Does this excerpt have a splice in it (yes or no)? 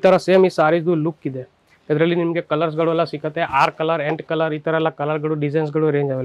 no